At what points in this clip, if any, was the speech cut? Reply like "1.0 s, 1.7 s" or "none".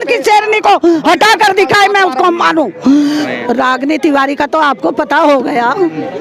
3.2 s